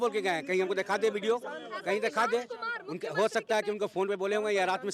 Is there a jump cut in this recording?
no; 0 cuts

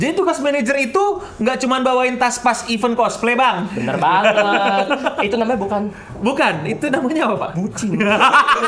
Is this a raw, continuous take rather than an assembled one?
yes; 0 cuts

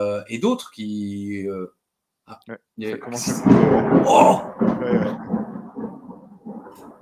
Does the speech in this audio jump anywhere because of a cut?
no; 0 cuts

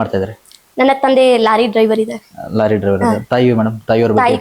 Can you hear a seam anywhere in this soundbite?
no; 0 cuts

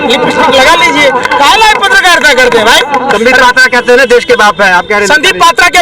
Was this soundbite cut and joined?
no; 0 cuts

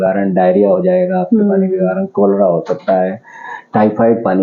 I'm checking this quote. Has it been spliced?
no; 0 cuts

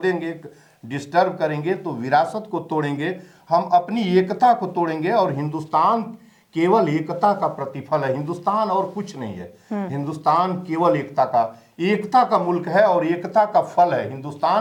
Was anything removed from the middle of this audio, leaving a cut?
no; 0 cuts

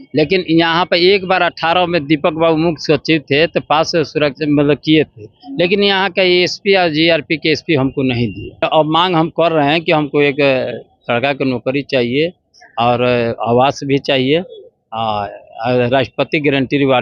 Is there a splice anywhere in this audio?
yes; 1 cut; at 8.6 s

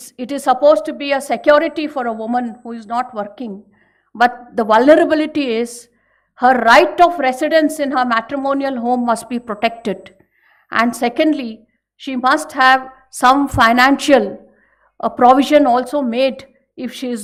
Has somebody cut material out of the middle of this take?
no; 0 cuts

